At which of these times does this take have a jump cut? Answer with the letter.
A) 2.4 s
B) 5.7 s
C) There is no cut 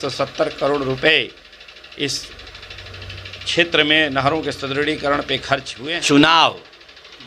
B